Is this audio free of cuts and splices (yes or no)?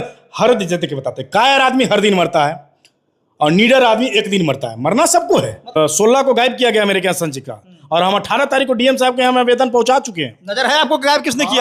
no